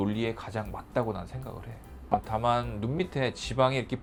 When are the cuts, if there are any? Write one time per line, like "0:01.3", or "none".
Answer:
none